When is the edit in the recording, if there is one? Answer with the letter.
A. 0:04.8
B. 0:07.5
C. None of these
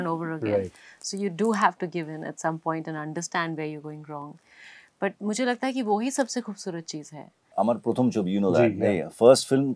B